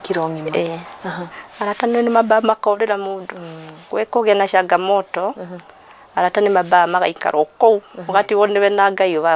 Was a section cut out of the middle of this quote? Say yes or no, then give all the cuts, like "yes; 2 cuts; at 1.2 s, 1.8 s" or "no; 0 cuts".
yes; 1 cut; at 1.3 s